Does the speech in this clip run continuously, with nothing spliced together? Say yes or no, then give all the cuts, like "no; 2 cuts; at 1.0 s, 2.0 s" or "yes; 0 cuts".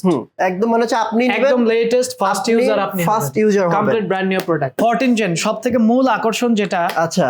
no; 1 cut; at 4.8 s